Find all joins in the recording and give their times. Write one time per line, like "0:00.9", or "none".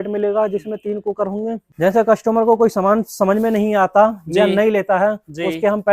0:01.7